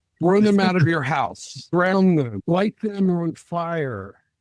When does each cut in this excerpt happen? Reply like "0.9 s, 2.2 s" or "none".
1.6 s, 2.4 s